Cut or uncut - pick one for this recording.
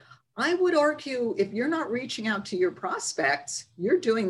uncut